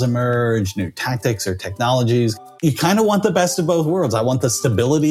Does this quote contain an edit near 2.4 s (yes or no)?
yes